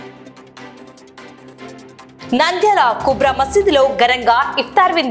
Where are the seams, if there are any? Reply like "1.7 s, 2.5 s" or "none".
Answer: 1.8 s

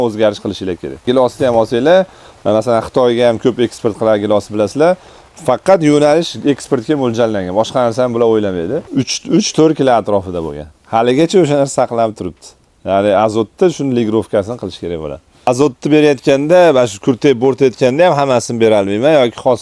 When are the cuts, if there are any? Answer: 1.0 s, 8.8 s, 15.5 s

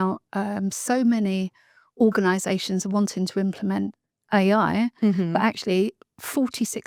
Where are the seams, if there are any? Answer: none

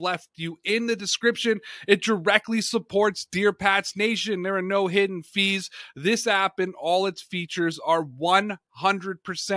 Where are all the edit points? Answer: none

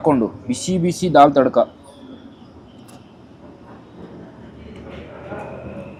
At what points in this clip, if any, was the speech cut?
none

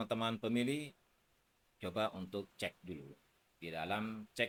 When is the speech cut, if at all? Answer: none

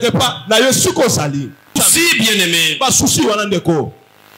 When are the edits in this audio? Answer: 1.8 s

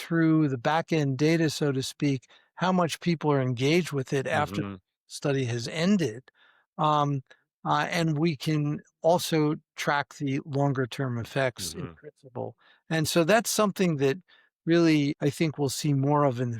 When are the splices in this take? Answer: 15.1 s

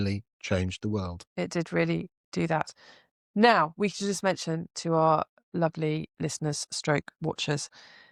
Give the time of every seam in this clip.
none

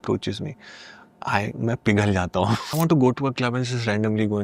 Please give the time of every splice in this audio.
2.7 s

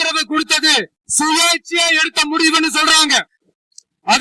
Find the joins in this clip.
none

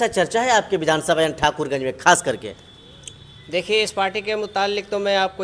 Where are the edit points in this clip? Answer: none

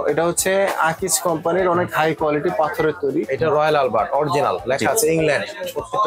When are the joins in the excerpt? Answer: 3.3 s

